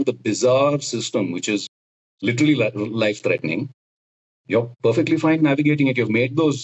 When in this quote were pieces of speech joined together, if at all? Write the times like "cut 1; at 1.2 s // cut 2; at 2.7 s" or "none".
none